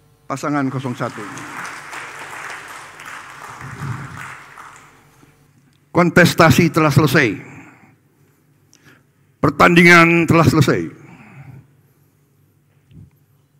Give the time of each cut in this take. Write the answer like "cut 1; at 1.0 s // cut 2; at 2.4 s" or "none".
cut 1; at 1.5 s